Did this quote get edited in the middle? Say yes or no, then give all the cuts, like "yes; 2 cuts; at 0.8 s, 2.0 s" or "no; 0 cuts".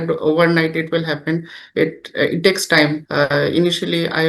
yes; 1 cut; at 3.0 s